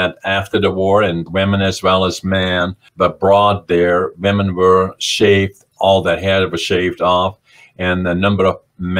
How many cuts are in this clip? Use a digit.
2